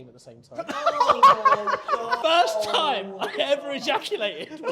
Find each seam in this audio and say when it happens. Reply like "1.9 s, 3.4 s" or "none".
2.2 s